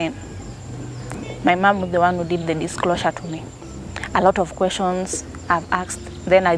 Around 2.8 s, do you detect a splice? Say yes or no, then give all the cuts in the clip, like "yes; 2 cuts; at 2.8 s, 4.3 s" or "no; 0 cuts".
no; 0 cuts